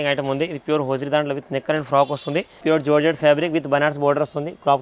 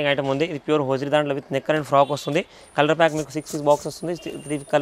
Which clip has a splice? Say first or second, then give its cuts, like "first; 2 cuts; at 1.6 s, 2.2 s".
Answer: first; 1 cut; at 2.6 s